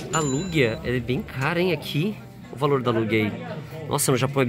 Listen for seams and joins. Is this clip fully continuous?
yes; 0 cuts

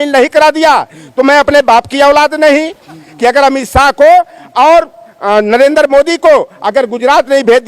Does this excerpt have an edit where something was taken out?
yes; 1 cut; at 3.0 s

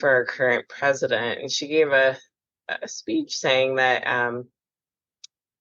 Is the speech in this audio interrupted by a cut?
no; 0 cuts

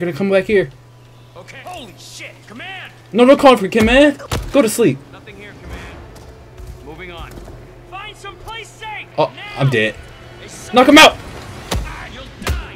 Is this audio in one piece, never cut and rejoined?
no; 3 cuts; at 2.9 s, 4.3 s, 9.1 s

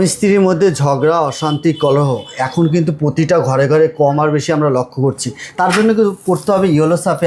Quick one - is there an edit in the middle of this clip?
no; 0 cuts

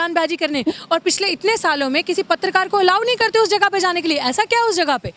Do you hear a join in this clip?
no; 0 cuts

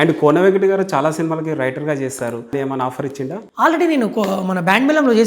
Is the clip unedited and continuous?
no; 1 cut; at 2.5 s

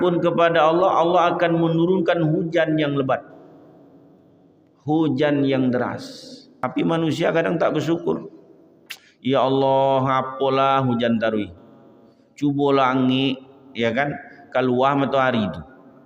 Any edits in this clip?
yes; 1 cut; at 6.6 s

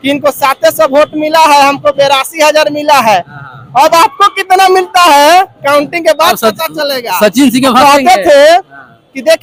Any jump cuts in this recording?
no; 0 cuts

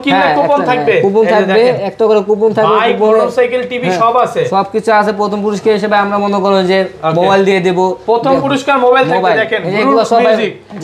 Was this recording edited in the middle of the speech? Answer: no; 0 cuts

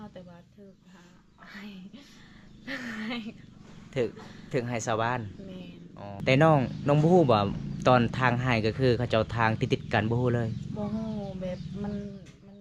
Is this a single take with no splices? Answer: no; 1 cut; at 6.1 s

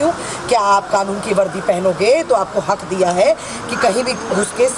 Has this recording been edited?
yes; 1 cut; at 3.9 s

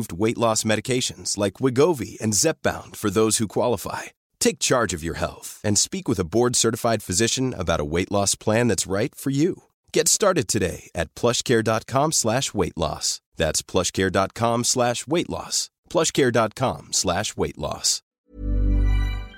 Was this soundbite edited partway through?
yes; 1 cut; at 18.1 s

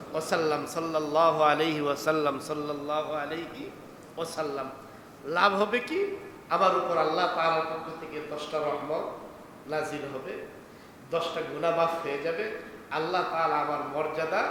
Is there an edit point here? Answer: no; 0 cuts

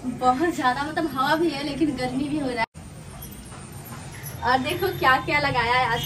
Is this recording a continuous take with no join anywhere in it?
no; 1 cut; at 2.6 s

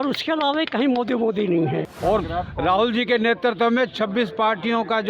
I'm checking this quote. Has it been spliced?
yes; 1 cut; at 1.9 s

